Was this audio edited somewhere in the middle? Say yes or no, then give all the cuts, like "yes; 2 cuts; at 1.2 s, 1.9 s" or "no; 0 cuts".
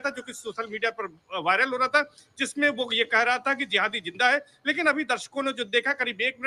no; 0 cuts